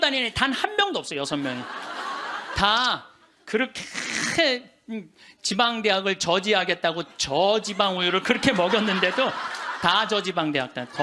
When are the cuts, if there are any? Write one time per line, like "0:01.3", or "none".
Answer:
none